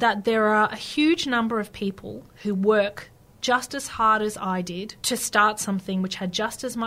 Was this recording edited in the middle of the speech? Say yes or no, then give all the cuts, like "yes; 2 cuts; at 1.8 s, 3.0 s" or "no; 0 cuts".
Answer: yes; 1 cut; at 4.9 s